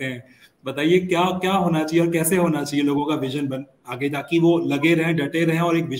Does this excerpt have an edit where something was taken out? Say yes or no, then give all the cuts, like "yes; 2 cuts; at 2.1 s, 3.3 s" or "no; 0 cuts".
no; 0 cuts